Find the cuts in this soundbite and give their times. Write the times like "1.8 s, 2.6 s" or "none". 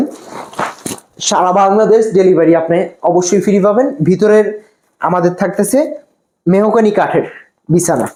none